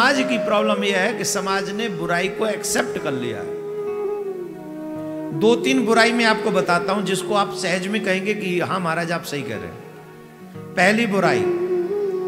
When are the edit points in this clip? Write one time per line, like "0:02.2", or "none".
none